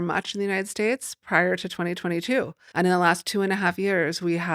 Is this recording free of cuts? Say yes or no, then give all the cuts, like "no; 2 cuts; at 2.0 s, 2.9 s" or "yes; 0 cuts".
no; 1 cut; at 2.6 s